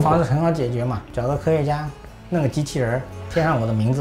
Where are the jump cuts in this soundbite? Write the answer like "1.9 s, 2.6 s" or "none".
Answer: 1.0 s

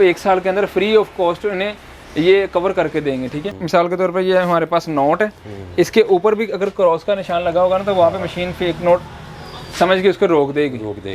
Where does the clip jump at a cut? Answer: 3.5 s

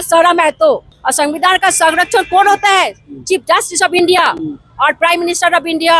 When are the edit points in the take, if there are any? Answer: 1.0 s

